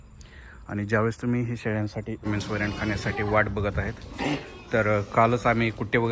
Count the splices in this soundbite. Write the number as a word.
one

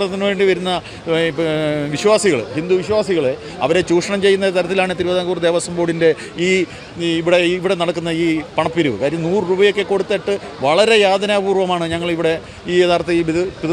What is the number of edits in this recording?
zero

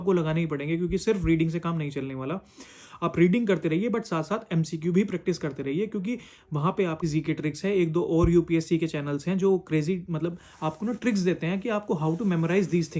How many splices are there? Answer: one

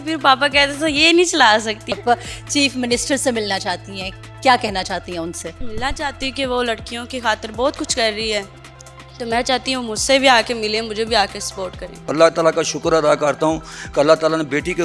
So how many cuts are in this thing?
three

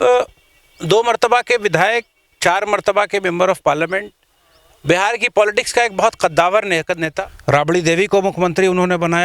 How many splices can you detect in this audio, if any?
one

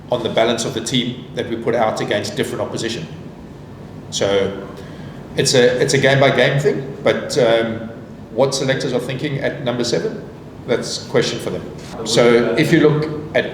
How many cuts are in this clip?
one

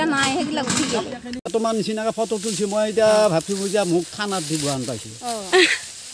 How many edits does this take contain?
one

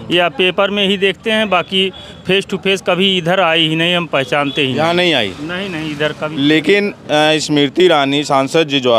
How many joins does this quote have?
zero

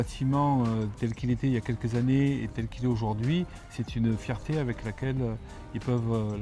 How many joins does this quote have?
zero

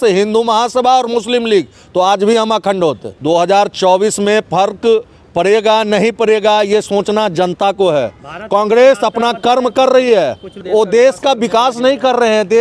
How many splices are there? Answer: two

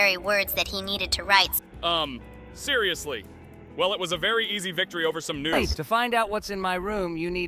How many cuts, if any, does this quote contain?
two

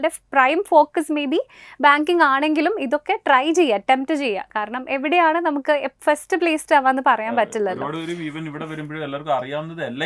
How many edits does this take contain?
zero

